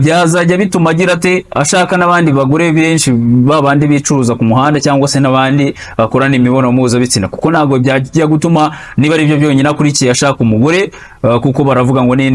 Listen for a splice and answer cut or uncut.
uncut